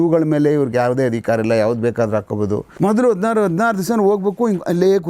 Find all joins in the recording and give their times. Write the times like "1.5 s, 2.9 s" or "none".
2.7 s